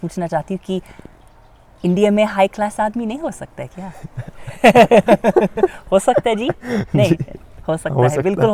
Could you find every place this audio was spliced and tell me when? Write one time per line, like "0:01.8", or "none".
none